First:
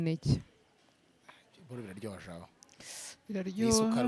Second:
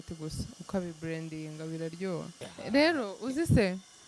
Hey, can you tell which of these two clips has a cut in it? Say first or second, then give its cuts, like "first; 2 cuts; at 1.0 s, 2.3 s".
second; 1 cut; at 2.5 s